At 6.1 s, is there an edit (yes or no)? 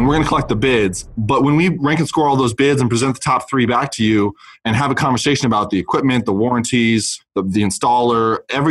no